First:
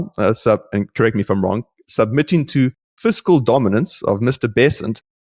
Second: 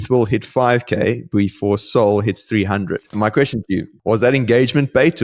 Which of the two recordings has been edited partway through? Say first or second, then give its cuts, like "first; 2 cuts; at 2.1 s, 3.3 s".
second; 2 cuts; at 3.1 s, 3.9 s